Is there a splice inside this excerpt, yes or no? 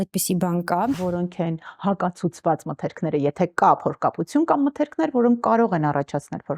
yes